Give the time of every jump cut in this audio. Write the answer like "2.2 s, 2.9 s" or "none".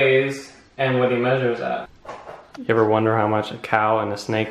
1.9 s